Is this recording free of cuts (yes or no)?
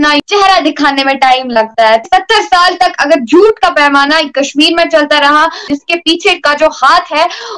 no